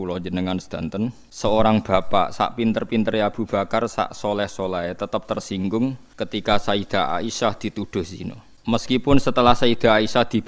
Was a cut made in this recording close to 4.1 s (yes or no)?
no